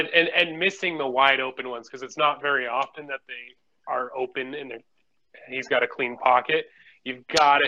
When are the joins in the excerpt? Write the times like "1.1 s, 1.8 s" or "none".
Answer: none